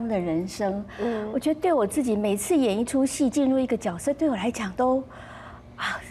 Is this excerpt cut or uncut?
uncut